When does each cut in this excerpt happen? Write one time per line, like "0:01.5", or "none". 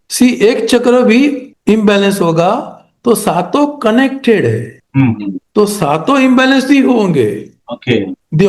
none

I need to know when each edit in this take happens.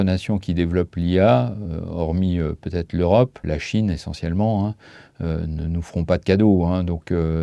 0:03.4

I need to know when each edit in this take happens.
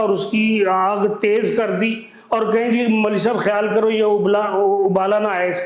none

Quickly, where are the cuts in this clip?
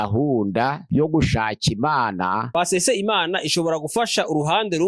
0:02.4

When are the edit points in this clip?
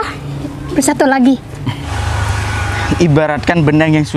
0:01.9

